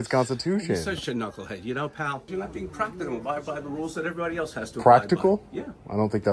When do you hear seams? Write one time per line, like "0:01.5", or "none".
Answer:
0:02.2